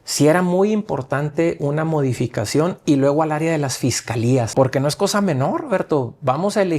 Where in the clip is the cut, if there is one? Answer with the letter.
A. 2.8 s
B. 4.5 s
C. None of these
B